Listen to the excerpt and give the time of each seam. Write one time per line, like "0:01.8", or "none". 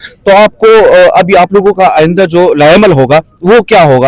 none